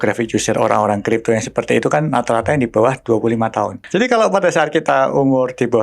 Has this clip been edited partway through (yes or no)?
yes